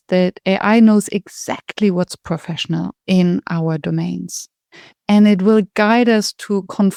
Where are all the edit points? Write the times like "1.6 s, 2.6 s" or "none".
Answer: none